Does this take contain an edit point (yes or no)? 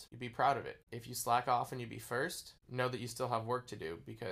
no